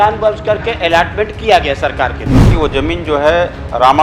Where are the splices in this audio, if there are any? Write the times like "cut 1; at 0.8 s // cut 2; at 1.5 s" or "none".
cut 1; at 2.5 s